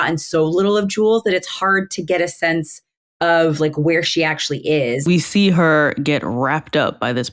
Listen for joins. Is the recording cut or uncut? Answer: cut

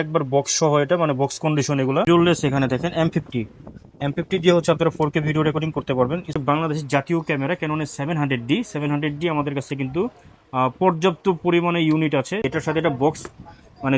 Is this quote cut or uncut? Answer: cut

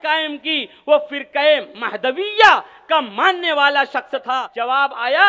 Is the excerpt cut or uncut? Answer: cut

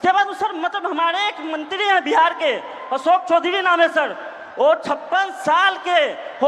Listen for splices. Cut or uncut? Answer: uncut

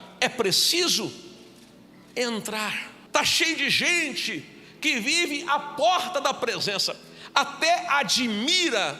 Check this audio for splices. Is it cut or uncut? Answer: cut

